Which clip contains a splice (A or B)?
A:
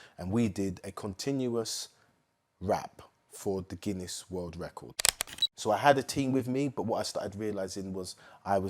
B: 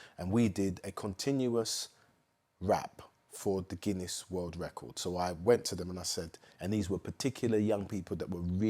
A